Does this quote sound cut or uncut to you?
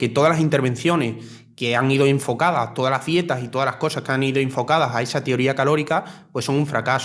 uncut